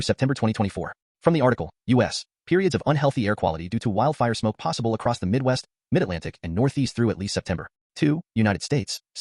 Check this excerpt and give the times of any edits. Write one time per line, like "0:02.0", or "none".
0:07.7